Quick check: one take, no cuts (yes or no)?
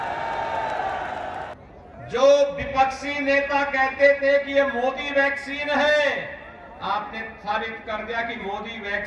no